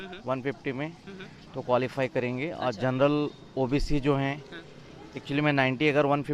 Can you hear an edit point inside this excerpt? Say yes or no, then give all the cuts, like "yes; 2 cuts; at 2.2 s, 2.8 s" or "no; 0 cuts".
no; 0 cuts